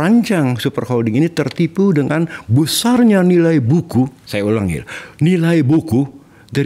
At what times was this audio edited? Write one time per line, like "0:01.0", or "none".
none